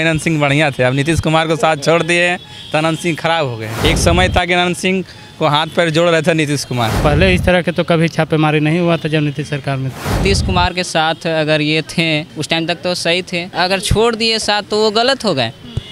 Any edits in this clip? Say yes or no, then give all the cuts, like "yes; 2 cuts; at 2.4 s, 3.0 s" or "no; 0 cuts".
yes; 4 cuts; at 3.7 s, 7.0 s, 10.2 s, 13.5 s